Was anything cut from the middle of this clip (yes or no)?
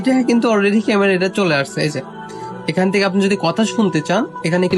no